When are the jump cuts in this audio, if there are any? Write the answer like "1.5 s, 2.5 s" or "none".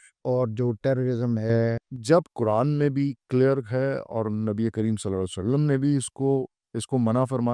1.9 s